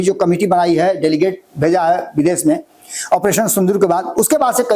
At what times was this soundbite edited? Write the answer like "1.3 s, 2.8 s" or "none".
none